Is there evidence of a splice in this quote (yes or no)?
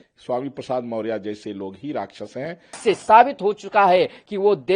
yes